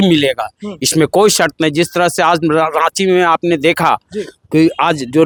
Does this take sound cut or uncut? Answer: uncut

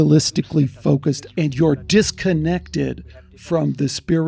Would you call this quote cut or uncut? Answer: cut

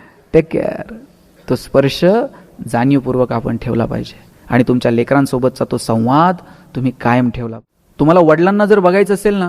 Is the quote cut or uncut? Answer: cut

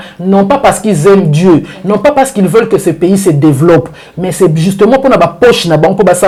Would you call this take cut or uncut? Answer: uncut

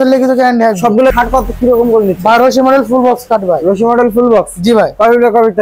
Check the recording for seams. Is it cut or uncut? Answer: cut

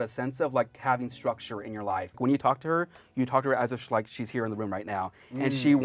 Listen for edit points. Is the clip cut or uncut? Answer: cut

